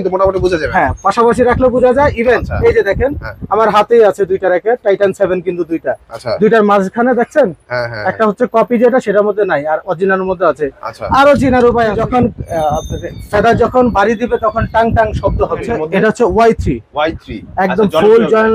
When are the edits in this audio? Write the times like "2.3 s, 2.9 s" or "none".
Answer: 12.0 s, 15.7 s

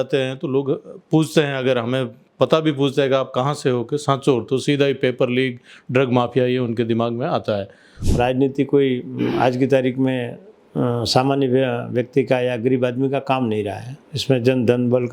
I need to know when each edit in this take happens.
8.0 s

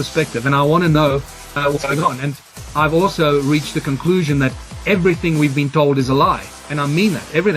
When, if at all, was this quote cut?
2.2 s

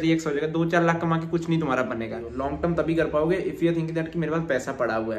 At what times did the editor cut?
2.3 s

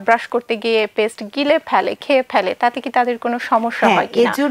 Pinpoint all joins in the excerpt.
none

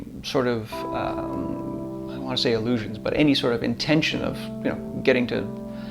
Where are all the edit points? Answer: none

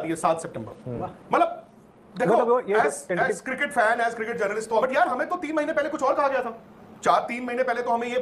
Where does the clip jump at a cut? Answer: 4.8 s

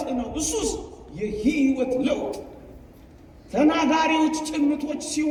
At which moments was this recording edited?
none

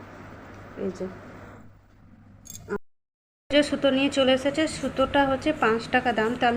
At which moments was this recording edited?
2.8 s

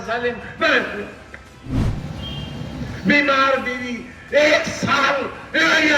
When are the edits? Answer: 1.8 s

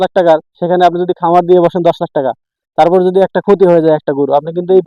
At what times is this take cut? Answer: none

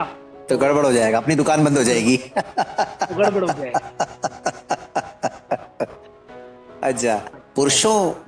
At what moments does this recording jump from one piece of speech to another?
7.3 s

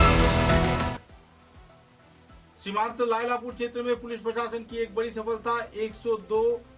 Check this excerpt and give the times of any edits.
0.9 s

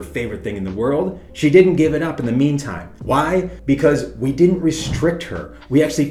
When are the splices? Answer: none

